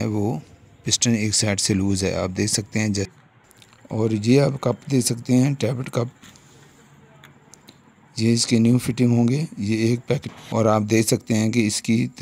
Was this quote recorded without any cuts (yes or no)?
no